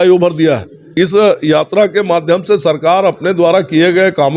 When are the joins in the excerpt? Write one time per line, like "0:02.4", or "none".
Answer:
0:00.9